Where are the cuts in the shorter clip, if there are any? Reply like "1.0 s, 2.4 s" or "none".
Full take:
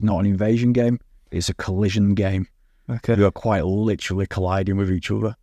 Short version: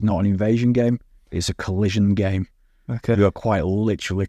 none